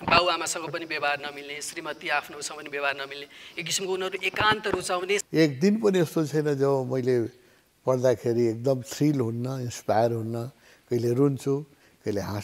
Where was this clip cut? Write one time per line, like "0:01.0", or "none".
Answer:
0:05.2